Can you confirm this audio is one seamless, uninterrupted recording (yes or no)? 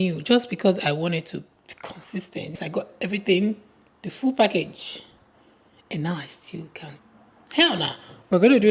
no